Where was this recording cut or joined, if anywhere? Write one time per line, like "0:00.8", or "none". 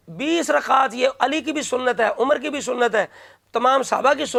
none